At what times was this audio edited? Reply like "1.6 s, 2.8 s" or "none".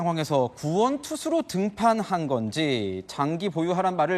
1.1 s